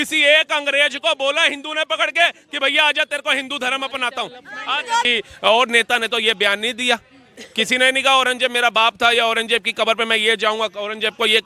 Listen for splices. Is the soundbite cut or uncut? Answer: cut